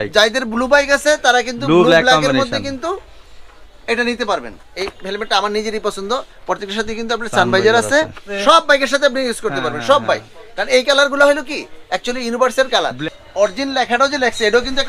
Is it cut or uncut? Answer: cut